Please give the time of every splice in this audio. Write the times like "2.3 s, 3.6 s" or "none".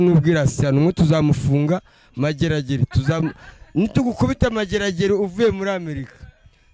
none